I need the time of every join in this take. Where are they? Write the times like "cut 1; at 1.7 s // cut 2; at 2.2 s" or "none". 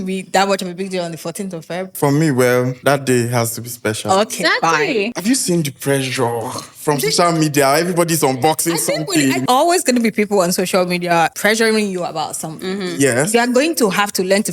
cut 1; at 1.9 s // cut 2; at 2.7 s // cut 3; at 5.1 s // cut 4; at 9.4 s // cut 5; at 11.3 s

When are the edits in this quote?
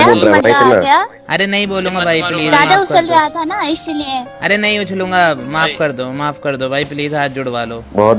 none

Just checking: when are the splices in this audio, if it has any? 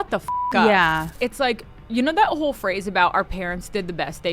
cut 1; at 1.1 s

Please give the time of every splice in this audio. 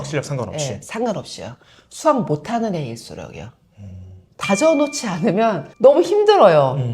cut 1; at 4.3 s

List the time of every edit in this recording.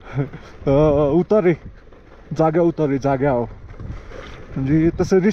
none

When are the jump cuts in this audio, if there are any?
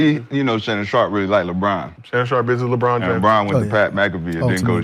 cut 1; at 1.9 s

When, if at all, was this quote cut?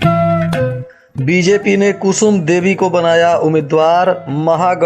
cut 1; at 0.9 s

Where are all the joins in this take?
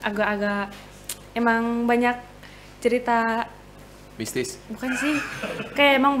none

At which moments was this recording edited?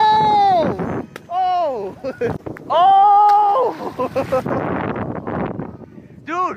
cut 1; at 2.3 s

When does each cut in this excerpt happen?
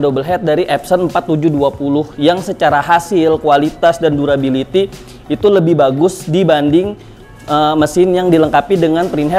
none

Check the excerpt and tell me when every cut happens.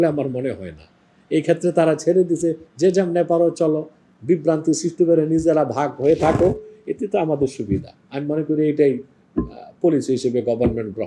none

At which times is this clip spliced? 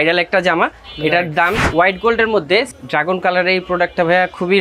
cut 1; at 1.6 s // cut 2; at 2.7 s

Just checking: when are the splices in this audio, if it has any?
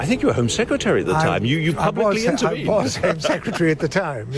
none

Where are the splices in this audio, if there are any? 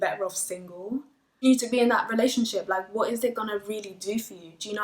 cut 1; at 1.2 s

